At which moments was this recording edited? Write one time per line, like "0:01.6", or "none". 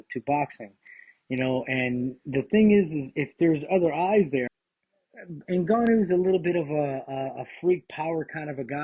0:04.5